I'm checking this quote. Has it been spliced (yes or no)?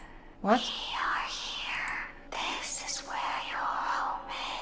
no